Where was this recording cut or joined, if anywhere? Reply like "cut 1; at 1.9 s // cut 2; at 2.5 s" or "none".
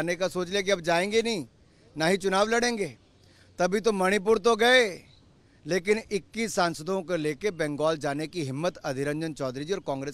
none